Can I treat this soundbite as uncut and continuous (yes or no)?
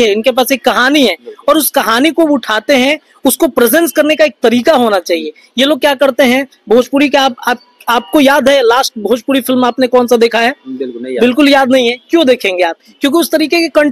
yes